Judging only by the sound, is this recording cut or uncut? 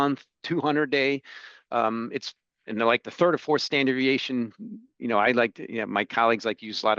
uncut